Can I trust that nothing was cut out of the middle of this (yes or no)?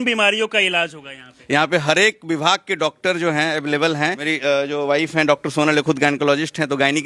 no